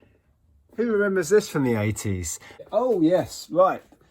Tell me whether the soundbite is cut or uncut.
cut